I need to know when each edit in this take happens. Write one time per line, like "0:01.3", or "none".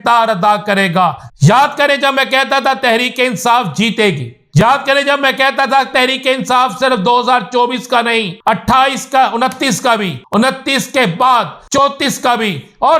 0:01.2
0:04.6
0:08.4
0:10.2
0:11.8